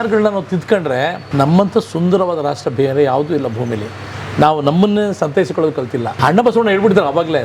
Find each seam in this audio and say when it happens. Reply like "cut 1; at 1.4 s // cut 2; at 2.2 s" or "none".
cut 1; at 1.2 s // cut 2; at 6.1 s